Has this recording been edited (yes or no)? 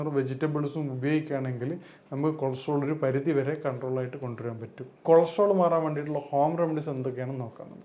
yes